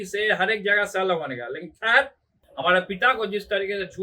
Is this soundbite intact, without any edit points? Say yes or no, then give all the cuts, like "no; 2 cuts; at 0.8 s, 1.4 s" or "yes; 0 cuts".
no; 1 cut; at 2.4 s